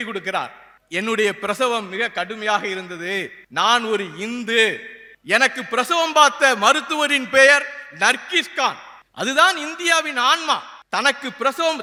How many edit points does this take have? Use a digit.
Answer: 0